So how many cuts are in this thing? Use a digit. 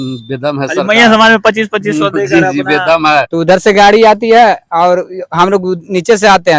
1